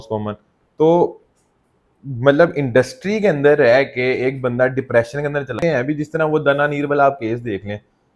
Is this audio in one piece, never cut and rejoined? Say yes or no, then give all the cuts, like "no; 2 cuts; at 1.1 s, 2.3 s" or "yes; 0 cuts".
no; 1 cut; at 5.6 s